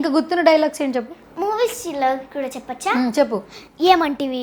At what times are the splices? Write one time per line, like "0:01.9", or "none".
none